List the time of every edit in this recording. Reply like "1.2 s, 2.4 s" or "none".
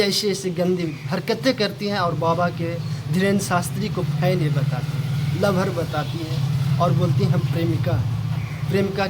none